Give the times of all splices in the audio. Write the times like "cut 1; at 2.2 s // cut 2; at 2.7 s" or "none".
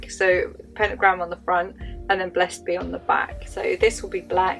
cut 1; at 3.4 s